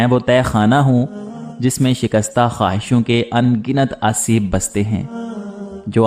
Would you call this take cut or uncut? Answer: uncut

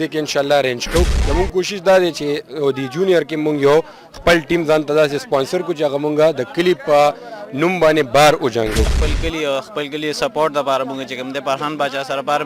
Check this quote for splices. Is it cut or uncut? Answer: cut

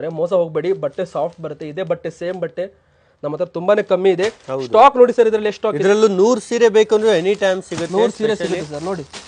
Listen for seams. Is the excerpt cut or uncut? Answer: uncut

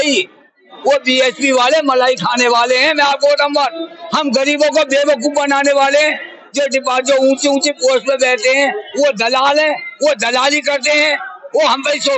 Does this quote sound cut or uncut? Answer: uncut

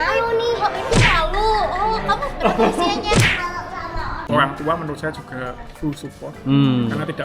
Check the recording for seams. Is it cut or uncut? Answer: cut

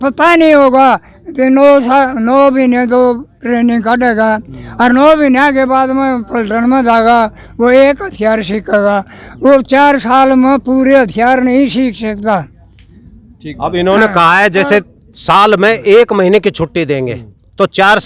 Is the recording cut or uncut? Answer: uncut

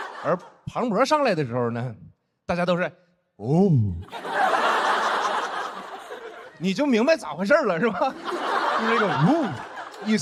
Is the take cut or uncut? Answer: uncut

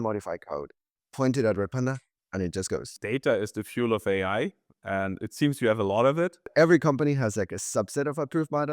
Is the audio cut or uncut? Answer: cut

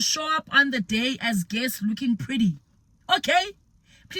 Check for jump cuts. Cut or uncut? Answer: uncut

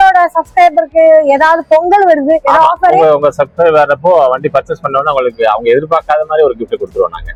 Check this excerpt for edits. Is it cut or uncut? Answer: uncut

